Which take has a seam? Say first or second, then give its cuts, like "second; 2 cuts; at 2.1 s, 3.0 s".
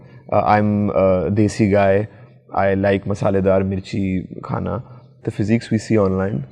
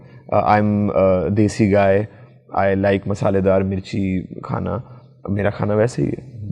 first; 1 cut; at 5.2 s